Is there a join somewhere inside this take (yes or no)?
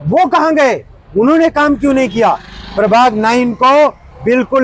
no